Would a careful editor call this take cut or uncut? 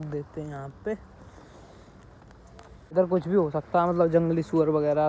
cut